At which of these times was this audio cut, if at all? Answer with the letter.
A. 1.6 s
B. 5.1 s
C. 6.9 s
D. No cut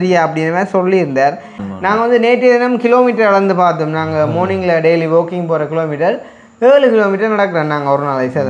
A